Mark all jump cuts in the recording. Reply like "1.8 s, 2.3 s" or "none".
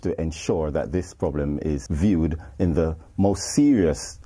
1.9 s